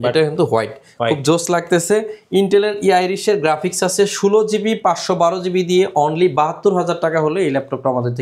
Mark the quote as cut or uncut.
uncut